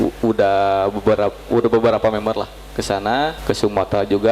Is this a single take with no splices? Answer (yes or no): no